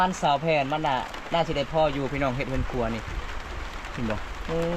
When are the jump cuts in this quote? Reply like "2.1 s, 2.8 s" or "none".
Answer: none